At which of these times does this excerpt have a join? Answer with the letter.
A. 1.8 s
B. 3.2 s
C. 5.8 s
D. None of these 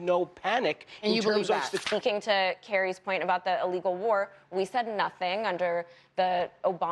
A